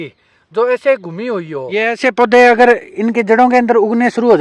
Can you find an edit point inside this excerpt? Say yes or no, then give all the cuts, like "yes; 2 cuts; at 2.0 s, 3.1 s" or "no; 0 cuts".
yes; 1 cut; at 1.8 s